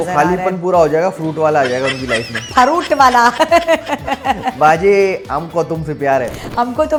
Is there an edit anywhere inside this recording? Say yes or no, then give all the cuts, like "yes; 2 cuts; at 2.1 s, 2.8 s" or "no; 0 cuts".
no; 0 cuts